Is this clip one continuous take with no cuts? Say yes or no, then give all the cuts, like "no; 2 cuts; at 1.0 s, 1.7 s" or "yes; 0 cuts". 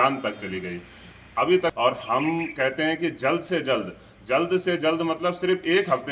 no; 1 cut; at 1.7 s